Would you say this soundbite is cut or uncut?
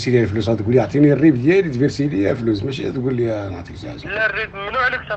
uncut